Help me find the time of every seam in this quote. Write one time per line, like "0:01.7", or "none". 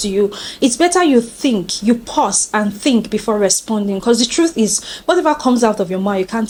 none